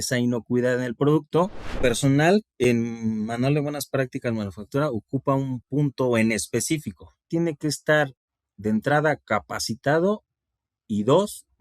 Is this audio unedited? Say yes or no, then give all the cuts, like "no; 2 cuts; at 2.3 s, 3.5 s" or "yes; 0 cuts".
no; 2 cuts; at 1.8 s, 7.3 s